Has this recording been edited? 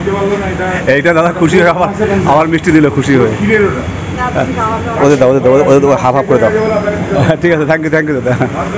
no; 0 cuts

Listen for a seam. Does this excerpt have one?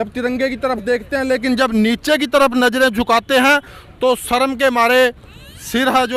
no; 0 cuts

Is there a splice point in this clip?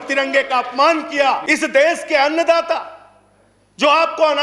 yes; 1 cut; at 1.4 s

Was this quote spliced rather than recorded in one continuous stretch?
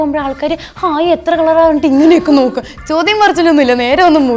no; 0 cuts

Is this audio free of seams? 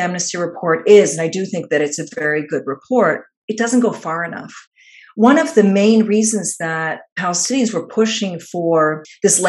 yes; 0 cuts

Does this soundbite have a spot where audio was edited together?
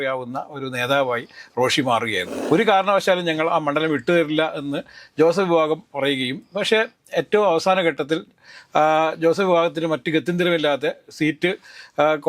yes; 1 cut; at 2.3 s

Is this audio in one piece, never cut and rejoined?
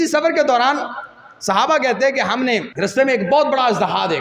no; 1 cut; at 2.7 s

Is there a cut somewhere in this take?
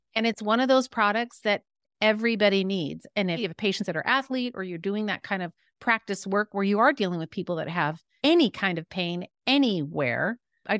no; 0 cuts

